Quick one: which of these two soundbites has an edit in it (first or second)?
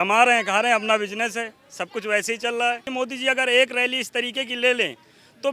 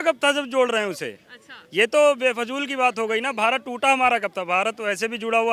first